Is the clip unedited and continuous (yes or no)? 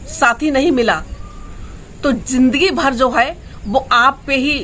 yes